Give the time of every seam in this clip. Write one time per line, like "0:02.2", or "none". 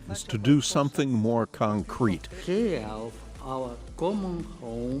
0:02.3